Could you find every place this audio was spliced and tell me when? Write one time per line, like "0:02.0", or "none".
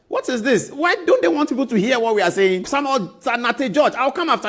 0:02.7